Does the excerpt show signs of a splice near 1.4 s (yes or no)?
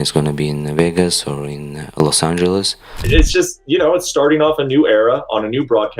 no